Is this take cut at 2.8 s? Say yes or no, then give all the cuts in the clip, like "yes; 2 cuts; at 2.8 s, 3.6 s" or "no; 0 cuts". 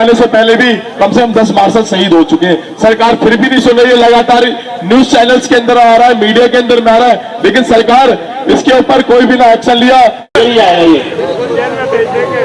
no; 1 cut; at 10.3 s